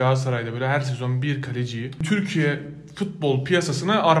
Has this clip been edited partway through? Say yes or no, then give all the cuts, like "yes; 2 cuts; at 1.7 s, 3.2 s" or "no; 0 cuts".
yes; 1 cut; at 2.0 s